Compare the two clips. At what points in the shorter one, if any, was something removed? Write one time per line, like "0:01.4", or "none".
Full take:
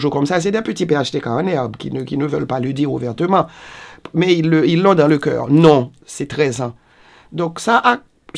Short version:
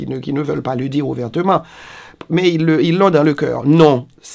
none